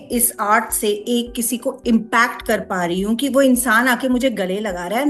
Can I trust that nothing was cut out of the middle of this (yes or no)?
yes